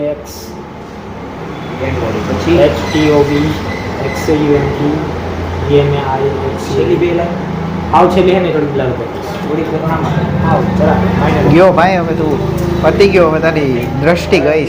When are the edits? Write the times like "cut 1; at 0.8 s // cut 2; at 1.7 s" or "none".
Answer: none